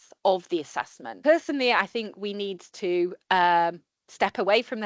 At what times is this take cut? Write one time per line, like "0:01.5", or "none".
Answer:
0:01.0